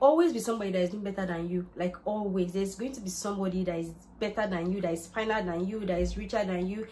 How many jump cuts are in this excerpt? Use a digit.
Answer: 0